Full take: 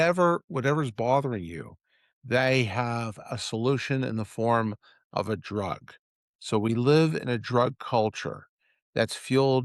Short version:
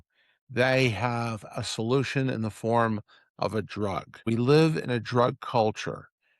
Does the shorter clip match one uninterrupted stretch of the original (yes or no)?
no